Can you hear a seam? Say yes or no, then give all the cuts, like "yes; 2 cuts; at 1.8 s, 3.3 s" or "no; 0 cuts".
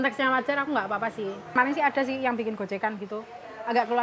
yes; 1 cut; at 1.5 s